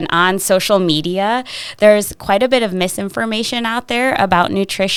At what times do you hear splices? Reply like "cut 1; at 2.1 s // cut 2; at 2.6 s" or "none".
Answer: none